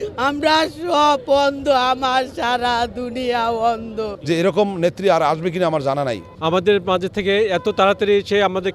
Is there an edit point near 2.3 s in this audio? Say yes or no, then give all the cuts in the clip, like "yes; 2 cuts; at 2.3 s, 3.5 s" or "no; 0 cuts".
no; 2 cuts; at 4.1 s, 6.3 s